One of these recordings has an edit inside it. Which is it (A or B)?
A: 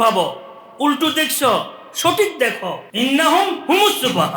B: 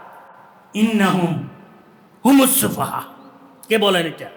A